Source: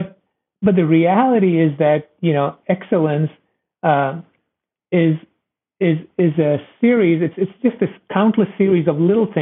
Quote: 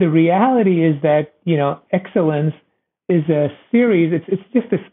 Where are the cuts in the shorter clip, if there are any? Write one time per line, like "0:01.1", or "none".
0:03.0